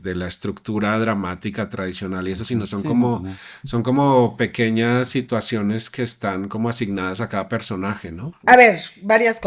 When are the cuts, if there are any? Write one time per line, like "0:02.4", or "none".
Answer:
0:08.5

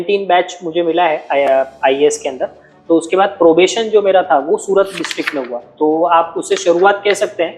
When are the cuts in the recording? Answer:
none

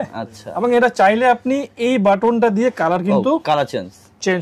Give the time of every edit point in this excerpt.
none

